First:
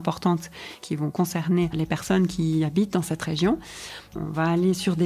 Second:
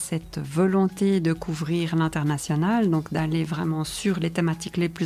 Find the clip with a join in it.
first; 3 cuts; at 0.8 s, 1.7 s, 4.1 s

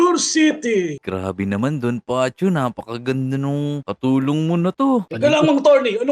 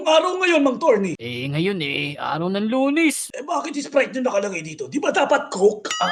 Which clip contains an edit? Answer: first; 2 cuts; at 1.0 s, 5.1 s

